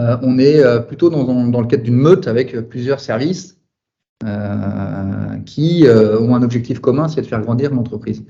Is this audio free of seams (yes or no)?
yes